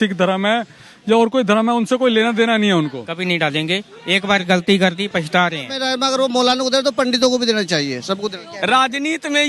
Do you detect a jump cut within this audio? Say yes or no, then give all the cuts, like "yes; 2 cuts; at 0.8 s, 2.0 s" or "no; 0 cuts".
yes; 3 cuts; at 3.1 s, 5.8 s, 8.4 s